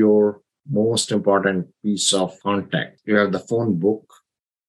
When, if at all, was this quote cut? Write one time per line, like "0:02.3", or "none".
0:02.9